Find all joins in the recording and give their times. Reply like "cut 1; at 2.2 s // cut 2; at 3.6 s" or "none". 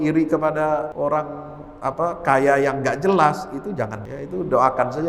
cut 1; at 0.9 s // cut 2; at 4.0 s